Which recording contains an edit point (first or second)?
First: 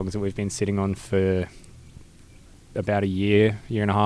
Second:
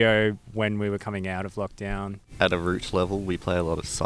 second